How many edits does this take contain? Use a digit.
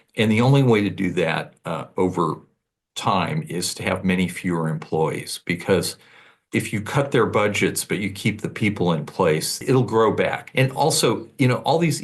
3